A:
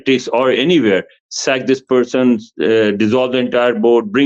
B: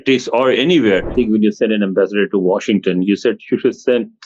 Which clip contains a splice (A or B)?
B